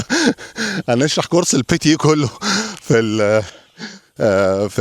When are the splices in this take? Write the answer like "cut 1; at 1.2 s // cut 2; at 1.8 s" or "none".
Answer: none